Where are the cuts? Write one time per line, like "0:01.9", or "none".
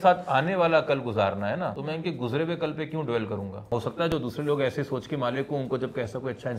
0:01.8
0:03.7